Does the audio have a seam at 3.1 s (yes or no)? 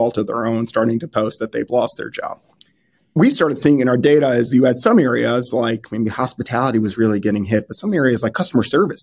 yes